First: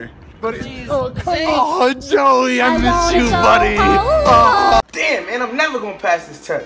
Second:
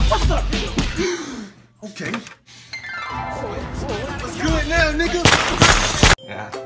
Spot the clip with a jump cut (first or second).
first